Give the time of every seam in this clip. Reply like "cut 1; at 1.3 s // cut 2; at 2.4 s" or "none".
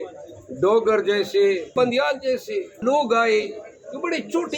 cut 1; at 1.7 s // cut 2; at 2.8 s

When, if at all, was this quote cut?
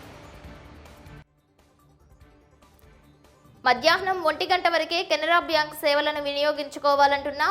cut 1; at 1.1 s

